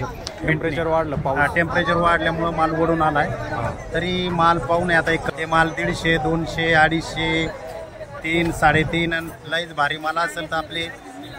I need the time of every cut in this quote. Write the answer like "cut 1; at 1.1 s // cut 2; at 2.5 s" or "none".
cut 1; at 5.3 s